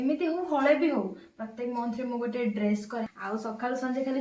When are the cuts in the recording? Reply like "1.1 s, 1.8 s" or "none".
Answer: 3.2 s